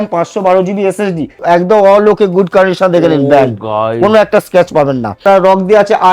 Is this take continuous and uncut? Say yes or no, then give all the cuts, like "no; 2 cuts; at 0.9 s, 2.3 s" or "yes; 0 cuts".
no; 2 cuts; at 1.4 s, 5.2 s